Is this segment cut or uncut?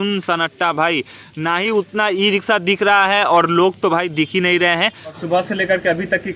cut